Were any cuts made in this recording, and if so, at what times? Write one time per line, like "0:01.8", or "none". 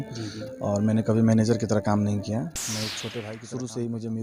0:03.1